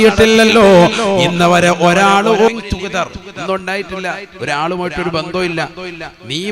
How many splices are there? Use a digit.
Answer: 1